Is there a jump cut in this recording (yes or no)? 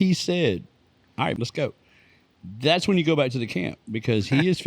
yes